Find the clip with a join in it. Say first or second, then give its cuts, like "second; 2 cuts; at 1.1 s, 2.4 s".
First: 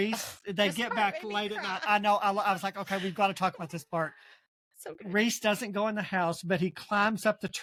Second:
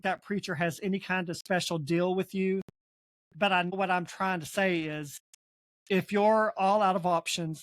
second; 1 cut; at 3.8 s